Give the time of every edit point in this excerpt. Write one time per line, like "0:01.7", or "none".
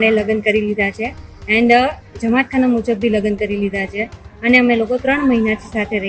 none